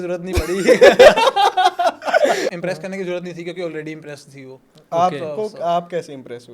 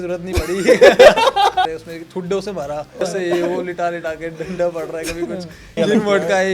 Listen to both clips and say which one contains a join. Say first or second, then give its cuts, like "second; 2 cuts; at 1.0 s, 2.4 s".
second; 3 cuts; at 1.6 s, 3.0 s, 5.7 s